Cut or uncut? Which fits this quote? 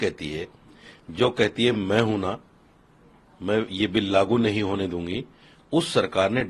uncut